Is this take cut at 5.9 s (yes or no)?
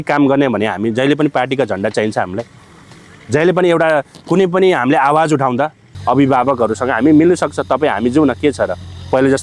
yes